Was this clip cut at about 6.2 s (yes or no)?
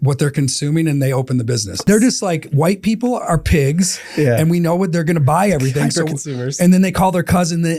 no